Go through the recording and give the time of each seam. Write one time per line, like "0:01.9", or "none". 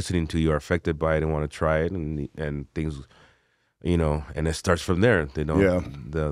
none